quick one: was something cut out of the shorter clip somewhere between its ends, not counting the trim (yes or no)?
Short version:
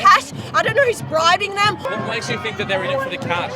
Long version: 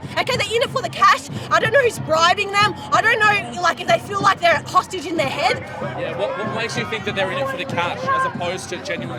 yes